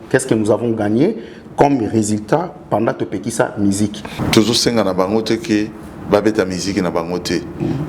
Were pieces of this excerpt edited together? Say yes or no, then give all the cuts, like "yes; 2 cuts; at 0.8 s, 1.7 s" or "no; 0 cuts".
yes; 1 cut; at 4.2 s